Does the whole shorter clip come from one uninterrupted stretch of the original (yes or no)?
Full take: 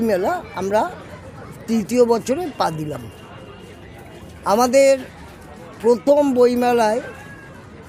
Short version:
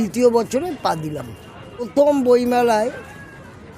no